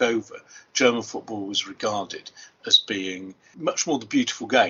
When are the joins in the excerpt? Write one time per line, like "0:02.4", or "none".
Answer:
0:03.4